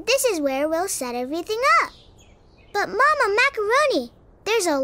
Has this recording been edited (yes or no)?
no